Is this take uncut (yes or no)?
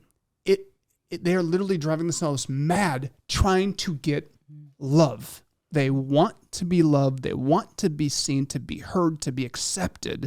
no